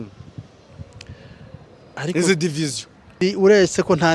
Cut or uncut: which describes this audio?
cut